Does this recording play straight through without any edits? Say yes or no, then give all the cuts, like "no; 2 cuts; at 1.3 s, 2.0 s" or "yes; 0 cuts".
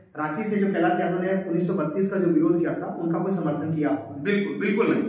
yes; 0 cuts